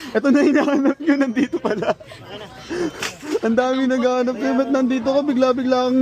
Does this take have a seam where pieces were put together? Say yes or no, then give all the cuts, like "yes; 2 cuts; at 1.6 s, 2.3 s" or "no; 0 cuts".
no; 0 cuts